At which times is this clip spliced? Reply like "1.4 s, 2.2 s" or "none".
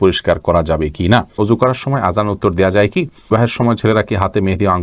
1.3 s, 3.3 s